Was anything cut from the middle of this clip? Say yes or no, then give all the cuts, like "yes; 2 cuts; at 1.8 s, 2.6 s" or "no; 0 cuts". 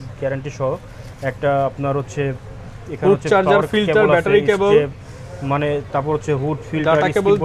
no; 0 cuts